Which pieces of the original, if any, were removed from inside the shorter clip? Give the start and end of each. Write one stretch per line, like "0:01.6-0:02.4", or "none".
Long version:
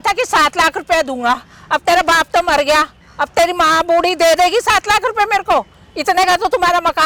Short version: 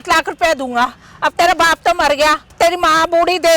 0:03.0-0:03.2